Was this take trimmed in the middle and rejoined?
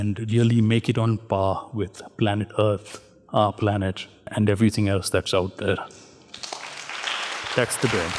yes; 1 cut; at 4.3 s

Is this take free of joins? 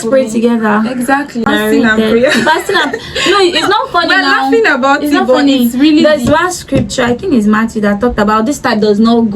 no; 1 cut; at 1.5 s

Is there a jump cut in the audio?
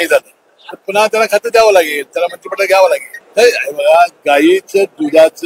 yes; 1 cut; at 3.2 s

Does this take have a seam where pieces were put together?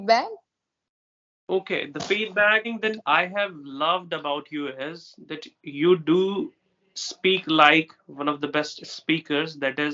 yes; 1 cut; at 2.7 s

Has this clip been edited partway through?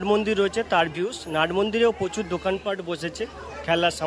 no; 0 cuts

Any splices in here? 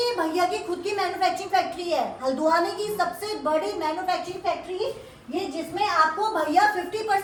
no; 0 cuts

